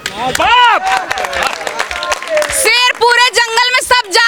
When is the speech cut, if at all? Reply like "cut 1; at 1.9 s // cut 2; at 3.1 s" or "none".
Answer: none